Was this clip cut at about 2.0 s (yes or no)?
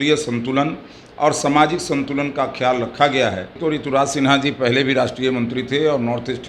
no